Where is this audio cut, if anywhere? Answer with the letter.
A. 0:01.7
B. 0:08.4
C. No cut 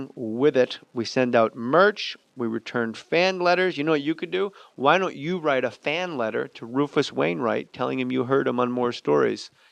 C